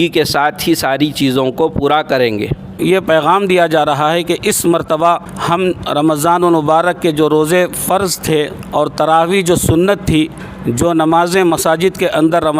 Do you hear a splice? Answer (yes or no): yes